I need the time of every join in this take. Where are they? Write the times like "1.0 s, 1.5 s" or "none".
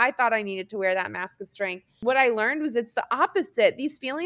2.0 s